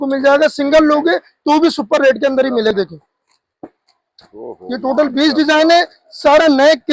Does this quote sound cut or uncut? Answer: cut